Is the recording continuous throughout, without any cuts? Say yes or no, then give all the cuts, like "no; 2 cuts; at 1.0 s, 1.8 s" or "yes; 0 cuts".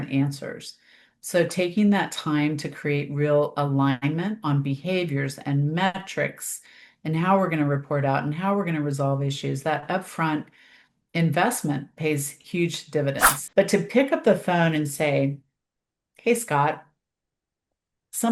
no; 1 cut; at 13.3 s